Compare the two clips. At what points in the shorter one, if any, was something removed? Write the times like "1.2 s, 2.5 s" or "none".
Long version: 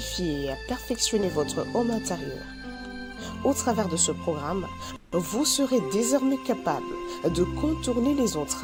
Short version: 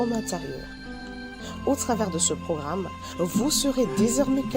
3.0 s